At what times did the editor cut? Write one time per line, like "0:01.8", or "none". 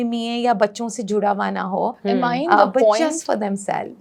none